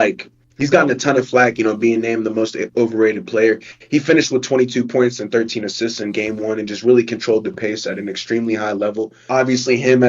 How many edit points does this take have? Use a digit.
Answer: 1